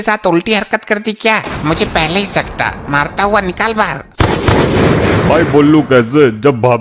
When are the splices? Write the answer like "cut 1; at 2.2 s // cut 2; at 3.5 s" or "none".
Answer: cut 1; at 4.0 s